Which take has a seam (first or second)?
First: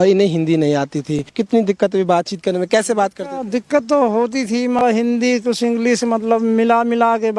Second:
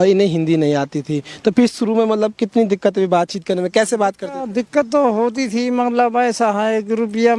first